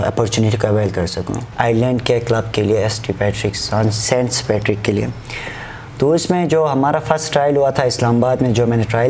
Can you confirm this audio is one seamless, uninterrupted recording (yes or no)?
no